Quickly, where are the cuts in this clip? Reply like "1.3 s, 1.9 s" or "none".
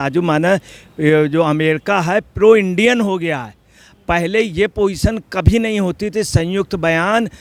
none